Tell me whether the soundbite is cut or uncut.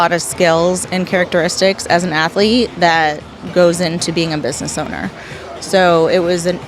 uncut